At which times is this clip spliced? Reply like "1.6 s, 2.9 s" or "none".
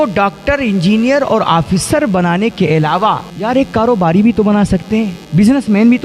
3.3 s, 5.2 s